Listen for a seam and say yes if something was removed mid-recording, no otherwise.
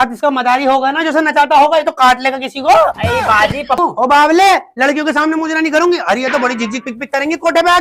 yes